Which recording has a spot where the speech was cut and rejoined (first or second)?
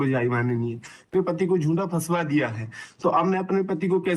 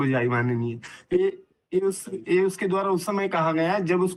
first